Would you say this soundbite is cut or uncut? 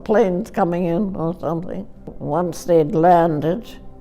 cut